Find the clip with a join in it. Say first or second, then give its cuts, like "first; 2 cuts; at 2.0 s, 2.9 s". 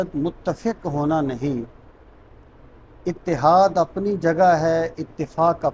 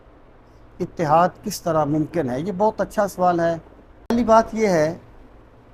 second; 1 cut; at 4.1 s